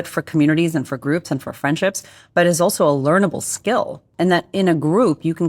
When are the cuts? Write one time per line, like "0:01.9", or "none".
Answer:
0:04.0